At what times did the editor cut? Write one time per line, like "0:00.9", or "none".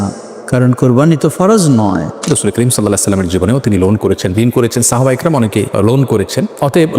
0:02.3
0:05.7